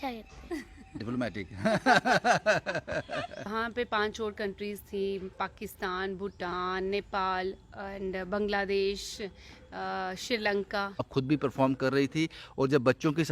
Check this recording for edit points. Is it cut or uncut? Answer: cut